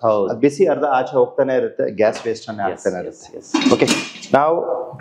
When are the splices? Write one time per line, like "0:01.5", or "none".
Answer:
none